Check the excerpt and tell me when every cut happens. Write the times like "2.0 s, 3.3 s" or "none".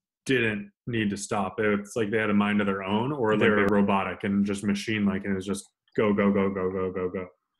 3.4 s